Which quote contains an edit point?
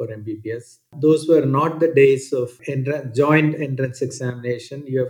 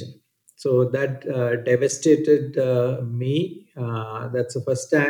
first; 2 cuts; at 0.9 s, 2.6 s

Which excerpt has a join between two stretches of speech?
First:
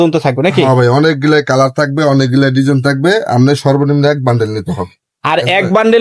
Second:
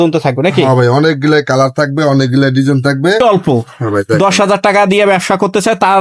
second; 1 cut; at 3.2 s

